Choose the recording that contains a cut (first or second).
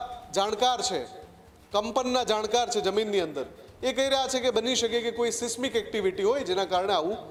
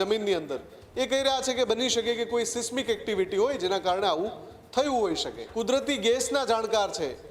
second